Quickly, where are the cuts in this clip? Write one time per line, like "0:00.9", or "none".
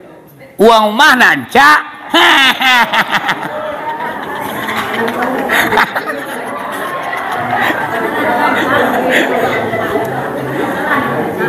none